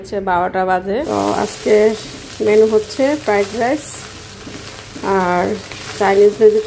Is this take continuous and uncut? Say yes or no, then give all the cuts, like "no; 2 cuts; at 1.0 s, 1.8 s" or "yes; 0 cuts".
no; 1 cut; at 1.1 s